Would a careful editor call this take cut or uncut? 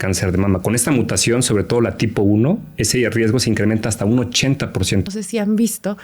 cut